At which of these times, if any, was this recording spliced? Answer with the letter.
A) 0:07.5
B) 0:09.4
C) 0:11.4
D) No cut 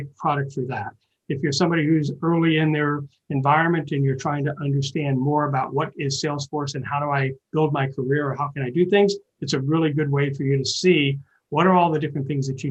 D